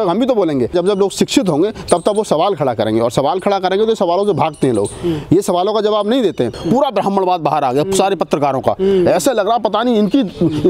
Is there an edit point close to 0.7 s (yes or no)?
yes